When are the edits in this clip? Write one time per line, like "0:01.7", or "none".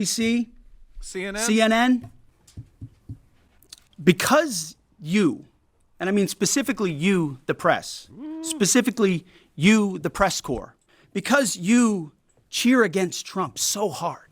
0:02.3